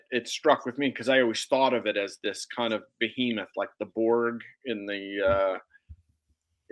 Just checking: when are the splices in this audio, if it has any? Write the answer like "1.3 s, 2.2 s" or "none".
none